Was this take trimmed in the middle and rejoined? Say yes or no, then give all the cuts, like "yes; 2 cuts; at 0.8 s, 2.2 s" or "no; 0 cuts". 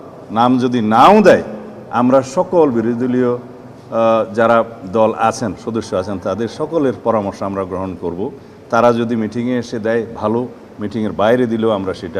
no; 0 cuts